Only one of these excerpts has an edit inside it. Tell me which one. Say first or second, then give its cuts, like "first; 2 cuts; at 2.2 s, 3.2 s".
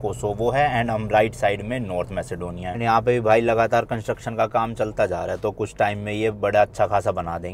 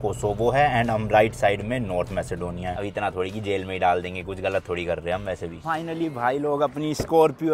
second; 2 cuts; at 2.7 s, 5.6 s